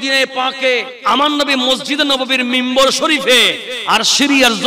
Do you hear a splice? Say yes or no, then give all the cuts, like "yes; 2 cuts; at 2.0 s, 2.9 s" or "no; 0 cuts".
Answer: yes; 1 cut; at 0.9 s